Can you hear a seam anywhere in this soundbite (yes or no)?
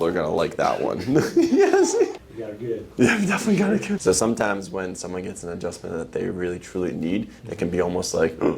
yes